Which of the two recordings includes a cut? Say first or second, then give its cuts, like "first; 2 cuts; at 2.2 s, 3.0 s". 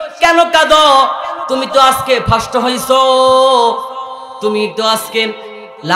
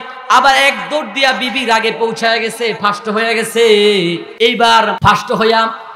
second; 2 cuts; at 4.3 s, 5.0 s